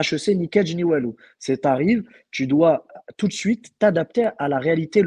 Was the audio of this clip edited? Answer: no; 0 cuts

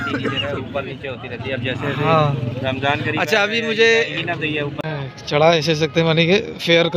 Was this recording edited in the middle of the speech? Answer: yes; 1 cut; at 4.9 s

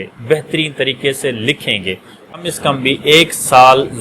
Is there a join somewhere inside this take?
yes; 1 cut; at 2.4 s

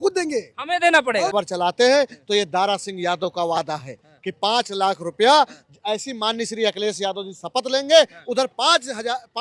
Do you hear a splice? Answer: yes; 1 cut; at 1.3 s

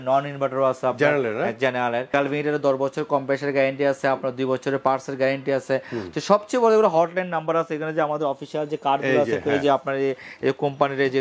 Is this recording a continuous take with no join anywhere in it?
no; 1 cut; at 2.1 s

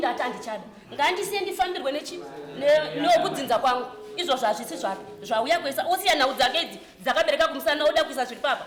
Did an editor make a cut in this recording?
no; 0 cuts

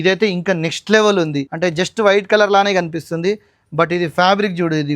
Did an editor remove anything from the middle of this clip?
yes; 1 cut; at 1.5 s

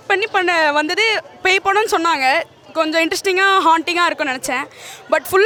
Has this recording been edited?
no; 0 cuts

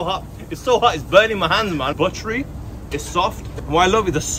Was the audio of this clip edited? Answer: yes; 2 cuts; at 2.0 s, 3.5 s

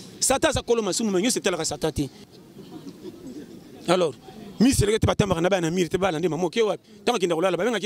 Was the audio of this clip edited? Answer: yes; 1 cut; at 2.3 s

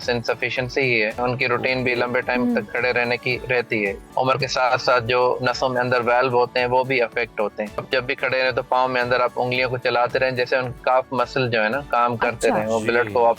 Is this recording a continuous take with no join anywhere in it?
no; 3 cuts; at 1.2 s, 4.0 s, 7.8 s

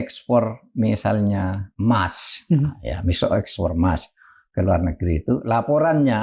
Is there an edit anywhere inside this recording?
no; 0 cuts

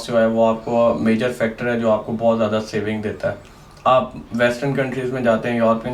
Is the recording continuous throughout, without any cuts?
yes; 0 cuts

